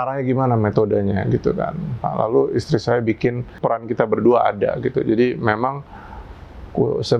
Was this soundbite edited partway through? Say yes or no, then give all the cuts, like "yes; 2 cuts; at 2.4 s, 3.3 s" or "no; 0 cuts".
yes; 1 cut; at 3.6 s